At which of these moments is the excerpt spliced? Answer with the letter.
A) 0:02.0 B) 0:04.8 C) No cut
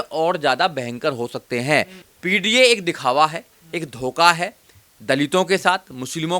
A